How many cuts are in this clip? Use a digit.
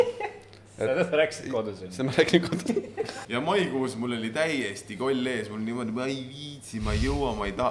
1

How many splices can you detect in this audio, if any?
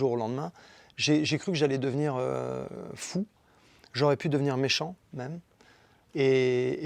0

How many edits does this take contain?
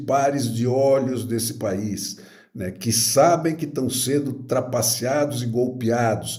0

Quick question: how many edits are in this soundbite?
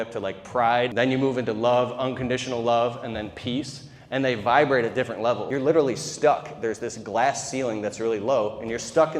2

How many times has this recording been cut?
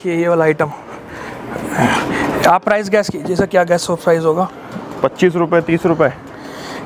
0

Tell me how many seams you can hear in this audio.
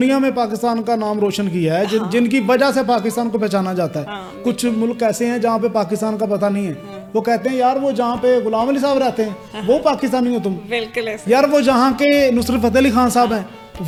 0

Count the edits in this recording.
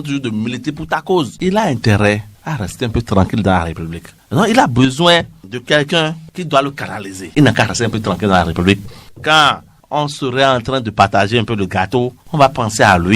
2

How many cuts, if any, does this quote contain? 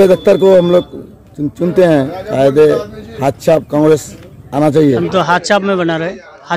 1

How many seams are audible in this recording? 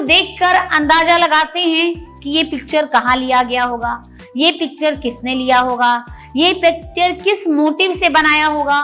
0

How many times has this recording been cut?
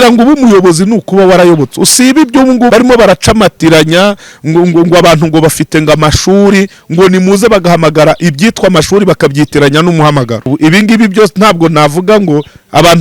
2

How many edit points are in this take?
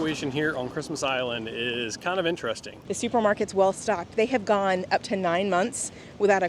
1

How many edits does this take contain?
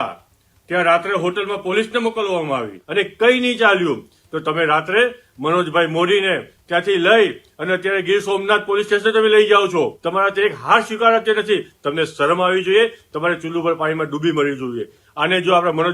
3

